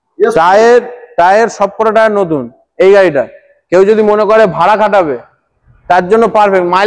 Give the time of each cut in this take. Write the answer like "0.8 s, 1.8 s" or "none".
none